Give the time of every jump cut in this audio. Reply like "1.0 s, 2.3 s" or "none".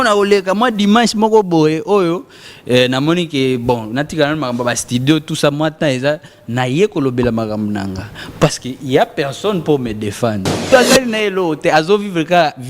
10.7 s